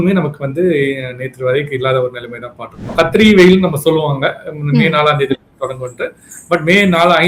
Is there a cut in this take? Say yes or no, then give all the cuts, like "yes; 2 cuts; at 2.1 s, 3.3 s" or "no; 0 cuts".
yes; 1 cut; at 2.9 s